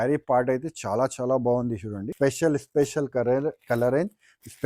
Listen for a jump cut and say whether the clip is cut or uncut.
cut